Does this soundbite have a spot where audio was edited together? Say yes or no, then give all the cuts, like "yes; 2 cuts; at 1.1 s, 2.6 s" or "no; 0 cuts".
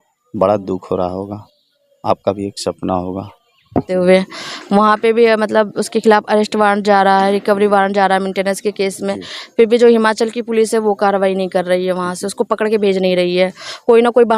yes; 1 cut; at 3.9 s